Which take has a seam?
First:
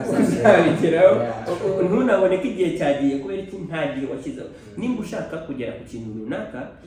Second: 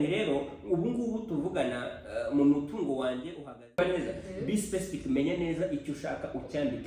second; 1 cut; at 3.8 s

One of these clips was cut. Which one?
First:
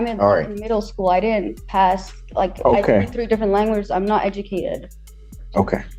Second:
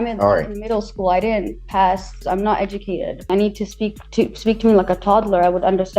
second; 2 cuts; at 2.2 s, 3.3 s

